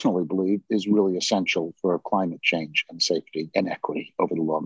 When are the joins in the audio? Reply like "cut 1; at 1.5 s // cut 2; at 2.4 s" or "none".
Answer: cut 1; at 3.5 s